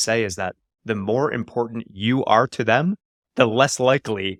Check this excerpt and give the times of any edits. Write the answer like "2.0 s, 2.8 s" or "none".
none